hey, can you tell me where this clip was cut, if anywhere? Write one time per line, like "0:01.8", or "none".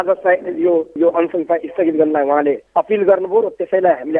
none